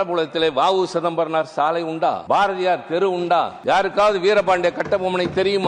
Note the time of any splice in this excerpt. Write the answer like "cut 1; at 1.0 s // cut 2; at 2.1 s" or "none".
cut 1; at 2.2 s // cut 2; at 3.5 s